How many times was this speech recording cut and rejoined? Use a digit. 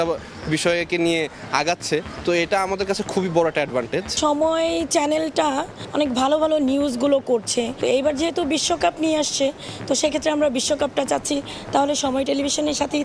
3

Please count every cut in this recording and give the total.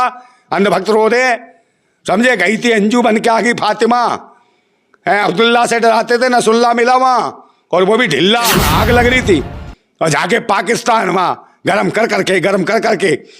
1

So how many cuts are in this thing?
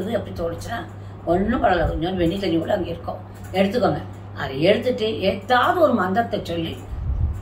0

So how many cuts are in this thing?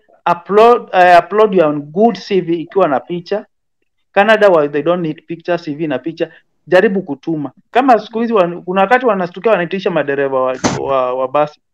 1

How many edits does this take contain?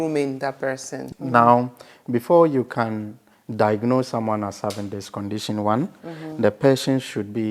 1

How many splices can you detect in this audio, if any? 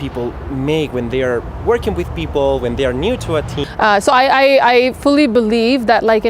1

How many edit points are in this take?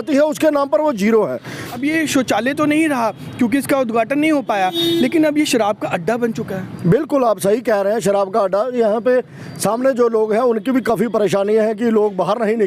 1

